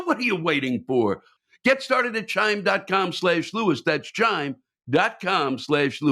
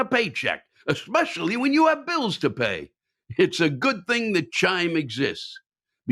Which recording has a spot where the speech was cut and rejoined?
first; 1 cut; at 1.3 s

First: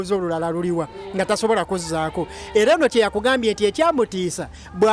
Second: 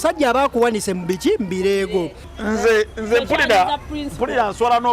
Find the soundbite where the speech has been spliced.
second; 1 cut; at 2.2 s

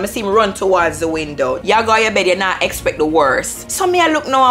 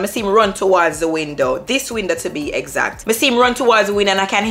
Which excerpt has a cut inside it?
first; 2 cuts; at 1.6 s, 3.6 s

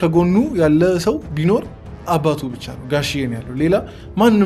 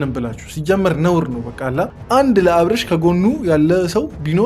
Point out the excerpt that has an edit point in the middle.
second; 1 cut; at 2.0 s

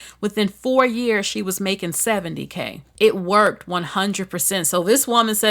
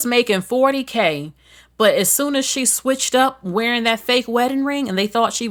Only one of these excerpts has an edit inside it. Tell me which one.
first; 1 cut; at 2.8 s

